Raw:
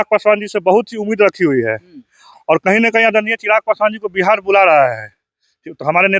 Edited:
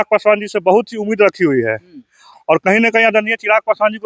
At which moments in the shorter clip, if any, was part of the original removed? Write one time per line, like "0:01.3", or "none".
none